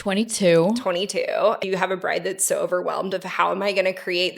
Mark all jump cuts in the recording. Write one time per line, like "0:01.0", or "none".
0:01.6